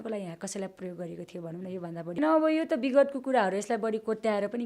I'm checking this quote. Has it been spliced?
yes; 1 cut; at 2.2 s

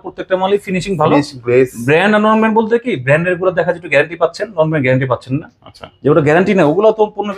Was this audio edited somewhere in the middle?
no; 0 cuts

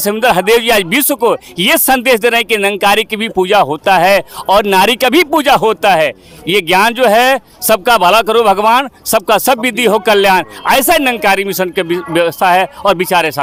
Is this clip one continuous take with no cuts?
yes; 0 cuts

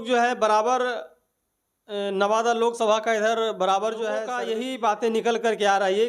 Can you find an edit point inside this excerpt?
yes; 1 cut; at 4.3 s

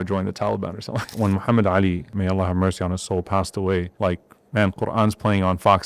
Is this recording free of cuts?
no; 3 cuts; at 1.1 s, 2.1 s, 3.9 s

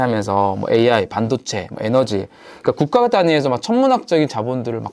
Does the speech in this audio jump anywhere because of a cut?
no; 0 cuts

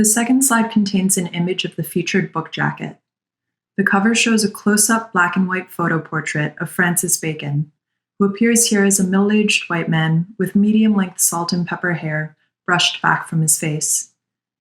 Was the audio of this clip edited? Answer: yes; 1 cut; at 1.1 s

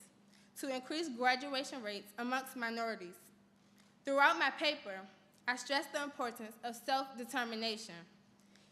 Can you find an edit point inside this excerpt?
no; 0 cuts

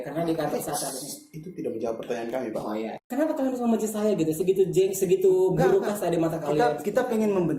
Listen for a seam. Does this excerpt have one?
yes; 1 cut; at 3.0 s

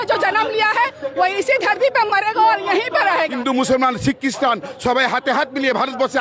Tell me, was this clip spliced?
yes; 1 cut; at 3.4 s

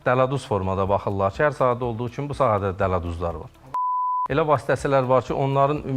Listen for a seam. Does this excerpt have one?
yes; 1 cut; at 4.1 s

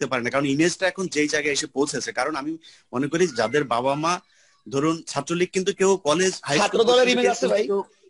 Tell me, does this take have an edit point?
no; 0 cuts

